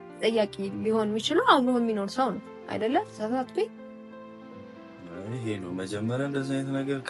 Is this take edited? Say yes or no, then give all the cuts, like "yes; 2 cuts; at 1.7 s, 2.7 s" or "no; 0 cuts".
no; 0 cuts